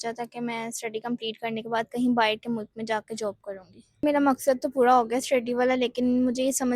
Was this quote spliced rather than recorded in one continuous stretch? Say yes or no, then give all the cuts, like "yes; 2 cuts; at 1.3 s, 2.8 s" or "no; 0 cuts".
yes; 1 cut; at 4.0 s